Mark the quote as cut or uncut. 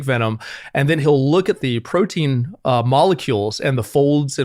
cut